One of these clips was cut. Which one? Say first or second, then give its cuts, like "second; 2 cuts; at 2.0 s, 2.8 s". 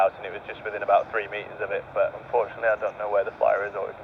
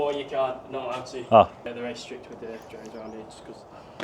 second; 1 cut; at 1.7 s